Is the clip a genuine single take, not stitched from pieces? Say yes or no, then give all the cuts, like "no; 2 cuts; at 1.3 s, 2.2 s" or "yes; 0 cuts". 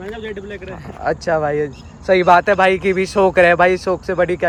yes; 0 cuts